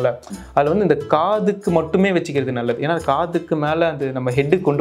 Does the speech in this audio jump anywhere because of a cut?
no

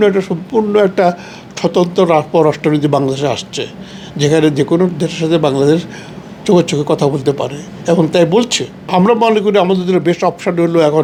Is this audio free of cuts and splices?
yes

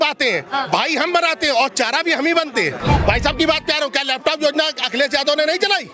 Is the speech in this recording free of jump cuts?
no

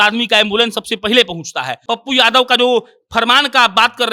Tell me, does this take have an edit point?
yes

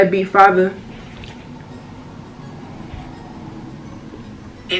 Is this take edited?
no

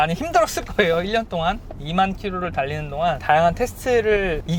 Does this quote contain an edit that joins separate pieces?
no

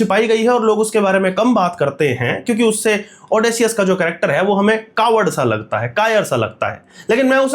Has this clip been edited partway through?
no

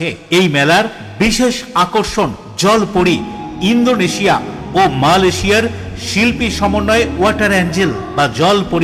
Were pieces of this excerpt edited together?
no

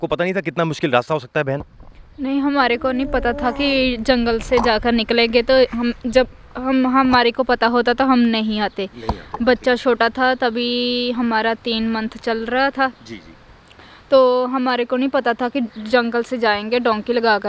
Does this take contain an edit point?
no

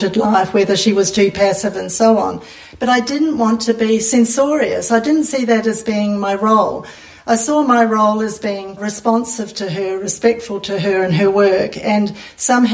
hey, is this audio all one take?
no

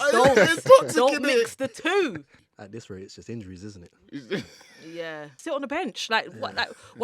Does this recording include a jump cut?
yes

